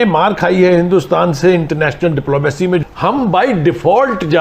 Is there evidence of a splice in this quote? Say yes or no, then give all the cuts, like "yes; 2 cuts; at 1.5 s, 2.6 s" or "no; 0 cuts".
yes; 1 cut; at 2.8 s